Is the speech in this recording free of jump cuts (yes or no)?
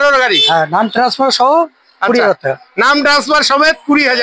yes